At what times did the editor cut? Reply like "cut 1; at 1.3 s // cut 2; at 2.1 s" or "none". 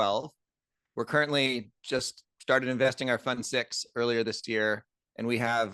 none